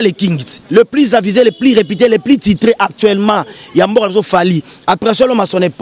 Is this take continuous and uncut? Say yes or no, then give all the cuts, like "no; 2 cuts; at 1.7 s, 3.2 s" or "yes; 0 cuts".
yes; 0 cuts